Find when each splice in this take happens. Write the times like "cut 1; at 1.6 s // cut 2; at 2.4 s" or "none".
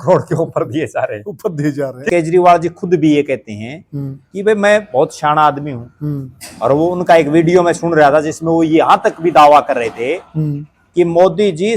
cut 1; at 2.0 s